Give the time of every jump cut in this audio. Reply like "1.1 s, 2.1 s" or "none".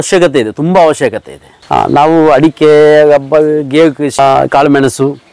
1.6 s, 4.2 s